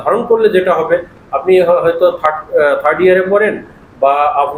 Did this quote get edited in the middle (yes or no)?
no